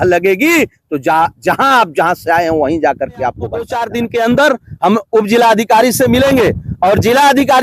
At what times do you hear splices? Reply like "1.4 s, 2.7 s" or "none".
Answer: 3.8 s